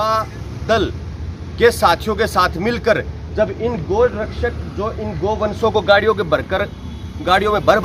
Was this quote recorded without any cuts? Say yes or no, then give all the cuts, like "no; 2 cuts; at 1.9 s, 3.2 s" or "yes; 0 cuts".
yes; 0 cuts